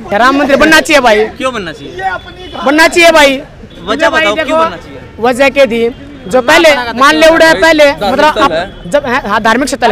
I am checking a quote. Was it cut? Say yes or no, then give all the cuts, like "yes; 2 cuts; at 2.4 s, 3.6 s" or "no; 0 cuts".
no; 0 cuts